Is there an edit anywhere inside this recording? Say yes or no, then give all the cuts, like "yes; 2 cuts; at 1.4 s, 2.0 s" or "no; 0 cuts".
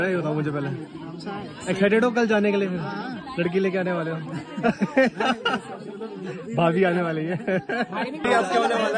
no; 0 cuts